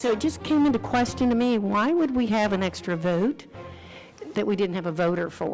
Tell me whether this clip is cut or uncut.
uncut